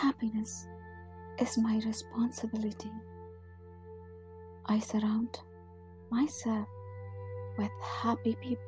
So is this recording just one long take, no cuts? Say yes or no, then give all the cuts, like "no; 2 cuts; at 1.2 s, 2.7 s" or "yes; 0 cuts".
no; 2 cuts; at 3.0 s, 4.7 s